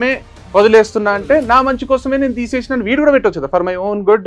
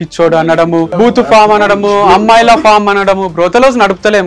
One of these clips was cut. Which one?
second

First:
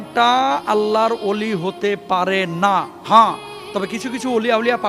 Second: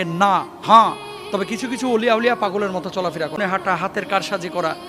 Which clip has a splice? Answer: second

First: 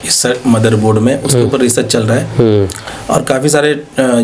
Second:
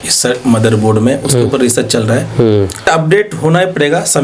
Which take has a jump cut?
second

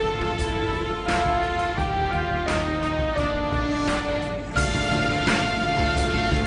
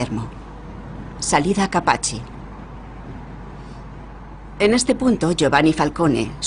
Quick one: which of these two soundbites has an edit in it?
first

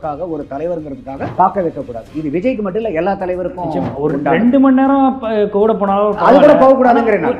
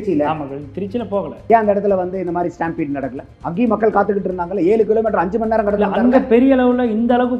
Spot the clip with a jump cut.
first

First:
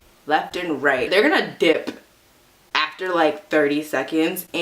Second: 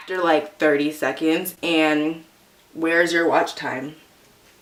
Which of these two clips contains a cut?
first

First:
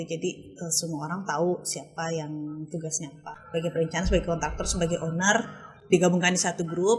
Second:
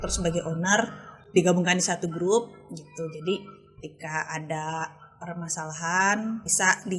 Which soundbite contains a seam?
first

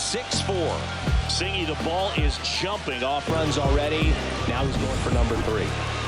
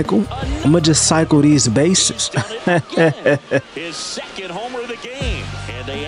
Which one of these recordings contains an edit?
first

